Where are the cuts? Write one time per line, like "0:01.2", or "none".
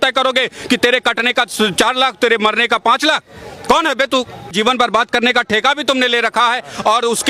0:04.5